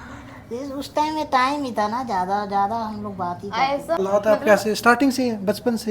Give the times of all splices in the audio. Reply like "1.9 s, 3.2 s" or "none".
4.0 s